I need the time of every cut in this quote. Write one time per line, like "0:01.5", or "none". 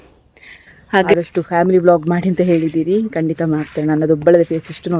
0:01.1